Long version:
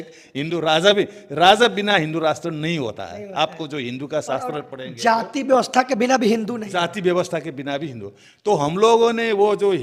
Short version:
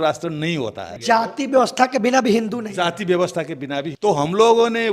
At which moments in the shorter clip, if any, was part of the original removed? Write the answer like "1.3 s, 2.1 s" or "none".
0.9 s, 3.9 s